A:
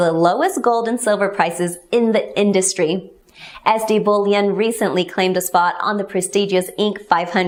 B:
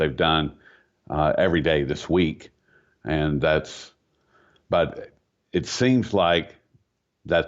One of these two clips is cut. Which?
B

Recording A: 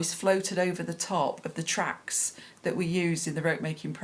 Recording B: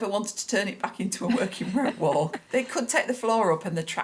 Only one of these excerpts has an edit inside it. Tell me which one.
B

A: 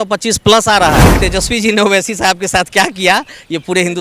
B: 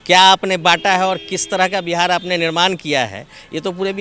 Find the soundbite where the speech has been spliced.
A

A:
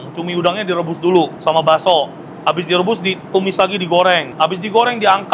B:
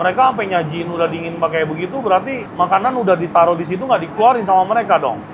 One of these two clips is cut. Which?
B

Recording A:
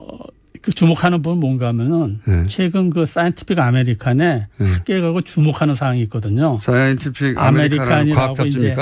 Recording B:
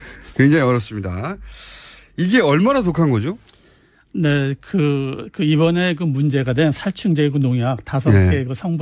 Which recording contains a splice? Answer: A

